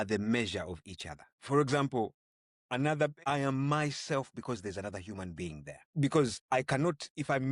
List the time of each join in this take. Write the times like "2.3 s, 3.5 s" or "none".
1.4 s, 3.2 s, 5.8 s, 6.4 s

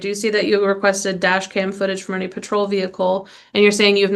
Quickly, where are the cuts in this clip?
none

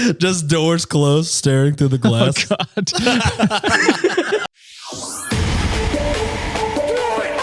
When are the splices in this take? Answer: 5.2 s

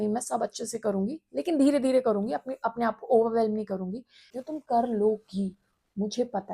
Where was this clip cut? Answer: 4.3 s

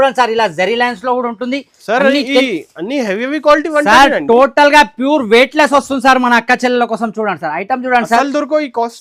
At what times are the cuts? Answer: none

